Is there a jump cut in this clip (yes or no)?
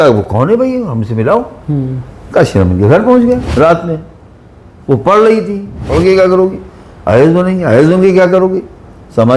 yes